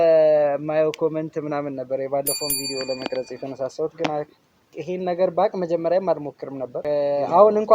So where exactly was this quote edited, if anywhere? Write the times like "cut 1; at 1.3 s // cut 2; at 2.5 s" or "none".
cut 1; at 6.8 s